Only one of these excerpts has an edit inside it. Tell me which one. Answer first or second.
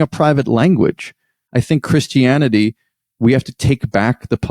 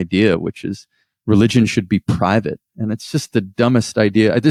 first